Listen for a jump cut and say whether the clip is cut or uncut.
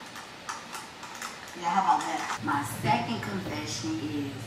cut